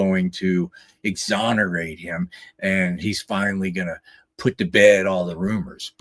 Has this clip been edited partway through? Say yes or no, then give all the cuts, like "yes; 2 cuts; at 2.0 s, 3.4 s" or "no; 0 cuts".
no; 0 cuts